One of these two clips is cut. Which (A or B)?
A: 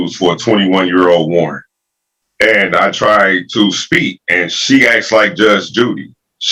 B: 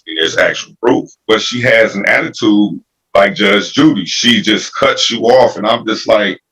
B